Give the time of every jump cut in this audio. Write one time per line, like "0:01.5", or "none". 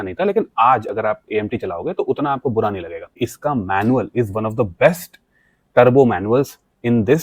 0:03.2